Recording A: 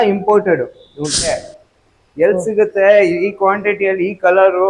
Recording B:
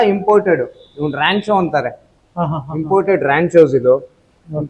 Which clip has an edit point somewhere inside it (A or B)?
A